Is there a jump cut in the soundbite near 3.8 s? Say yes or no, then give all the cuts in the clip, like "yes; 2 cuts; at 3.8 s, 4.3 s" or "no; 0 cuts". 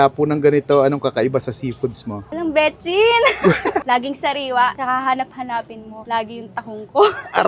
yes; 1 cut; at 3.8 s